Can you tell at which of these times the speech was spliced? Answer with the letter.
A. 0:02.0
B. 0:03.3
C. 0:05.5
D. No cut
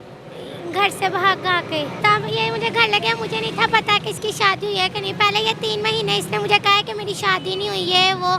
A